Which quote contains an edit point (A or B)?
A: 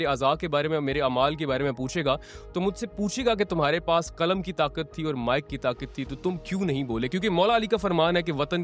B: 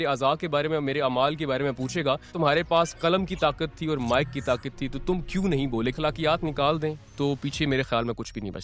B